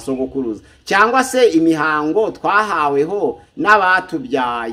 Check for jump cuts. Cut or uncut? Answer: uncut